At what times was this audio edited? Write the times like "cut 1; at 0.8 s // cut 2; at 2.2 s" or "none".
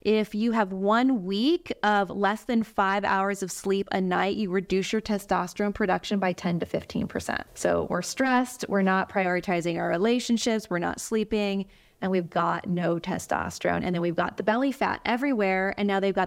cut 1; at 7.5 s